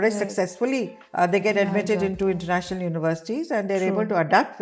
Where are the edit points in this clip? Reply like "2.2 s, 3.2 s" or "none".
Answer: 1.0 s